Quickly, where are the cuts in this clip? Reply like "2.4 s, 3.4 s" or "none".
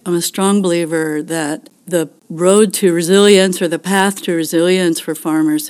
2.0 s